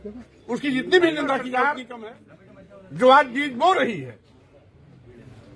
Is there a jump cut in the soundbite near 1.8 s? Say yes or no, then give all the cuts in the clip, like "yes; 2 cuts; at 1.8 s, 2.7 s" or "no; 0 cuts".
yes; 1 cut; at 1.8 s